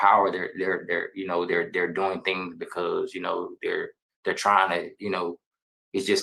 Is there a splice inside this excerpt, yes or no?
no